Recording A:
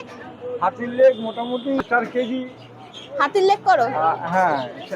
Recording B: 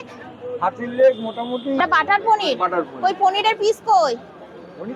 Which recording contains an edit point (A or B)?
B